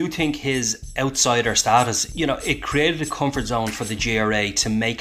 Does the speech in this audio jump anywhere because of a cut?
yes; 1 cut; at 2.0 s

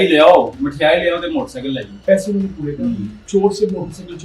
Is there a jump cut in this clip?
yes; 2 cuts; at 1.9 s, 3.1 s

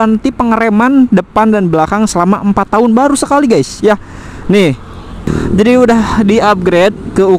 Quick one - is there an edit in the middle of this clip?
yes; 1 cut; at 5.3 s

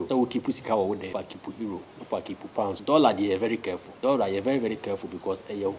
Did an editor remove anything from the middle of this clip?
yes; 3 cuts; at 1.1 s, 2.8 s, 3.8 s

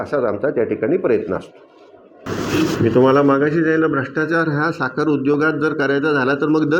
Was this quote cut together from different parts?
yes; 1 cut; at 2.3 s

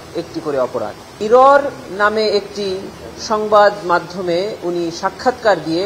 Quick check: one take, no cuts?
no; 1 cut; at 1.2 s

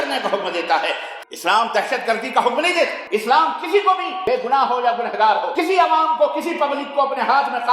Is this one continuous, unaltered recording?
no; 4 cuts; at 1.1 s, 3.0 s, 4.1 s, 5.5 s

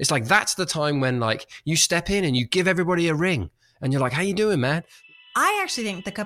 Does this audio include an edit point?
yes; 1 cut; at 4.9 s

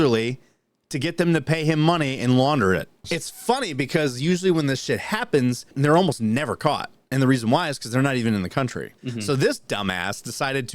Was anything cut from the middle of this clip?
yes; 3 cuts; at 3.0 s, 5.7 s, 9.0 s

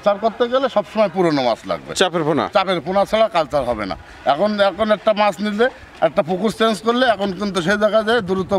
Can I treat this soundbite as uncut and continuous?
yes; 0 cuts

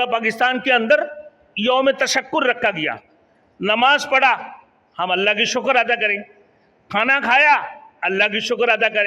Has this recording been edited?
no; 0 cuts

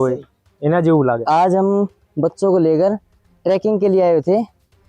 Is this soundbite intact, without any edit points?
no; 1 cut; at 1.2 s

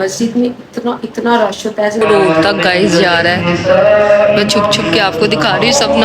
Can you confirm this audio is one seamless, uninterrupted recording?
no; 1 cut; at 2.0 s

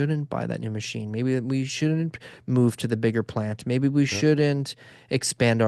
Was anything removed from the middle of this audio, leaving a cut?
no; 0 cuts

